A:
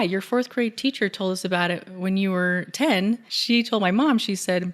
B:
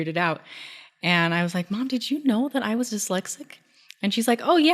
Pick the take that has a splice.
A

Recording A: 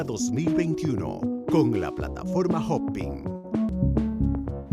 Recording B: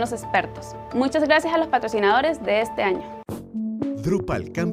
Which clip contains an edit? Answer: A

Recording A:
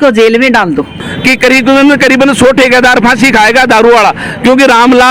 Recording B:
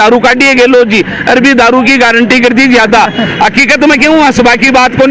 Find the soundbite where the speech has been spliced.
A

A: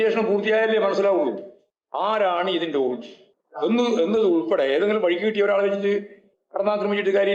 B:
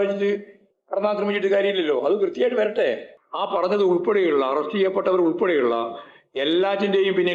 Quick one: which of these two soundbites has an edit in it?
B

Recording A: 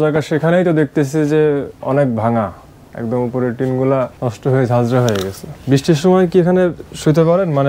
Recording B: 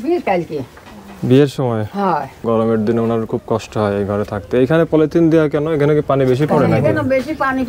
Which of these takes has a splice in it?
B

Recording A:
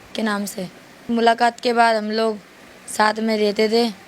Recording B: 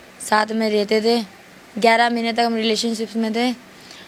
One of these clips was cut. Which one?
A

